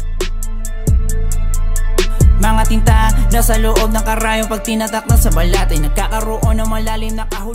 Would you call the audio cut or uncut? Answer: uncut